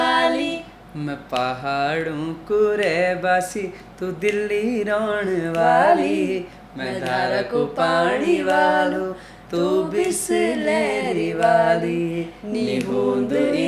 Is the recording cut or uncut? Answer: uncut